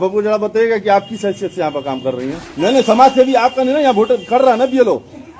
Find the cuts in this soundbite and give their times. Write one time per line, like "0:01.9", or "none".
0:02.5